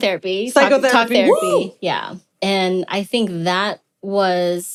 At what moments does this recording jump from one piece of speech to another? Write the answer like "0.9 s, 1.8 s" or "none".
none